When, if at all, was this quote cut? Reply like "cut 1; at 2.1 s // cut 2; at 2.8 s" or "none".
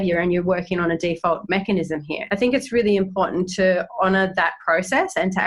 cut 1; at 2.1 s